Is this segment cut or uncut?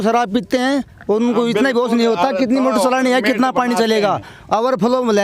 uncut